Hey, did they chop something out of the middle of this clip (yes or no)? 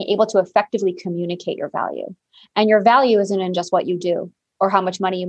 no